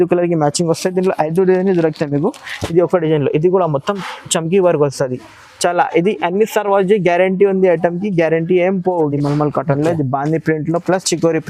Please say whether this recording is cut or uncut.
cut